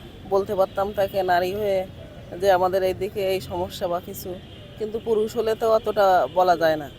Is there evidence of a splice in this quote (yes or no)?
no